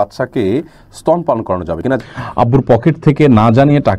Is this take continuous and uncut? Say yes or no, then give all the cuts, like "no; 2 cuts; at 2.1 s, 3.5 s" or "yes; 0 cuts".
no; 1 cut; at 2.0 s